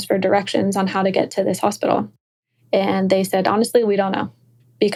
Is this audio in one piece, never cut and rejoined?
yes; 0 cuts

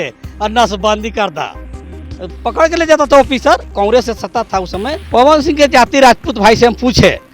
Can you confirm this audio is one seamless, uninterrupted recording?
no; 1 cut; at 5.0 s

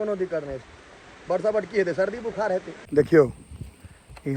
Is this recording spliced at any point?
yes; 1 cut; at 2.8 s

